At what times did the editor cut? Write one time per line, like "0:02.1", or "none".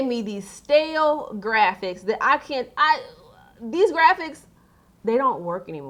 none

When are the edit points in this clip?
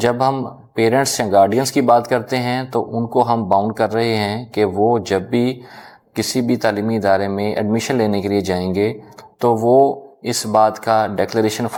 none

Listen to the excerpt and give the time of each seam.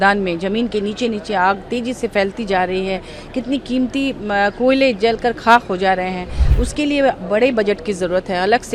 none

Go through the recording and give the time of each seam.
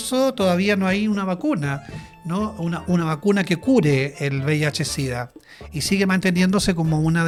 none

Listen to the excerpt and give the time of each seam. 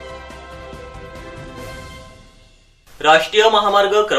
0:02.6

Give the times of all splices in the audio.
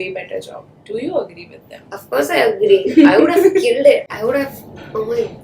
none

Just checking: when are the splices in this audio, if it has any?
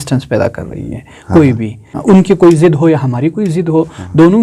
0:02.0

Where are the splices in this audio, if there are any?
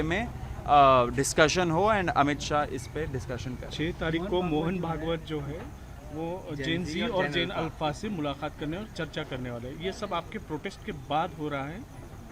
none

